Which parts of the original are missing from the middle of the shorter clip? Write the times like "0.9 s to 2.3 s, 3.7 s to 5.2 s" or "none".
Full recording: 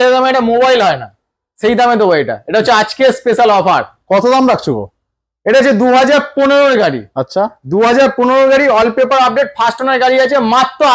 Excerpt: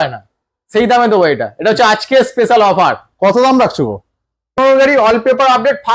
5.4 s to 8.3 s